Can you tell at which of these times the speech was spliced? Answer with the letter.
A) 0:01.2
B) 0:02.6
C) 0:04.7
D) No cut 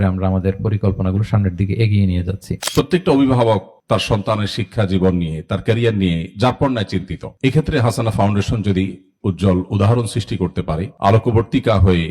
B